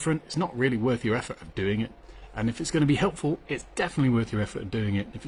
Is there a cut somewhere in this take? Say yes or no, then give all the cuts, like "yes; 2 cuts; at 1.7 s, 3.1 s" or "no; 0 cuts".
no; 0 cuts